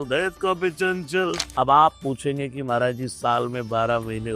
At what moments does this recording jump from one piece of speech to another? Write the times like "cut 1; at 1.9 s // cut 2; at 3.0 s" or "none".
cut 1; at 1.4 s